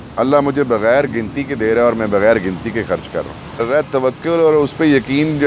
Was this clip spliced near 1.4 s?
no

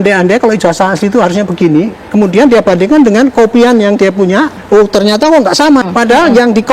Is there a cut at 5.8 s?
yes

